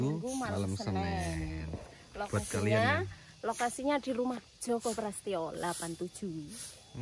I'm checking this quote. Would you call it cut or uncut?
uncut